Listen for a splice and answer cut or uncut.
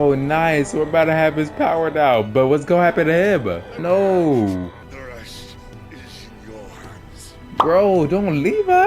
cut